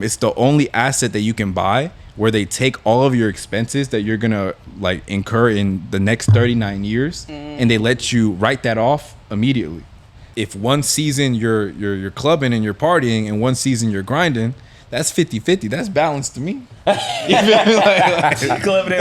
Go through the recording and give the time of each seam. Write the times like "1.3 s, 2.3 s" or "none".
10.2 s